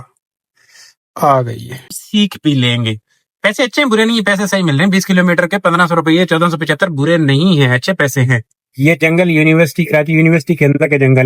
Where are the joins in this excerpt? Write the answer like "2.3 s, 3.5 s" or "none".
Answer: 2.0 s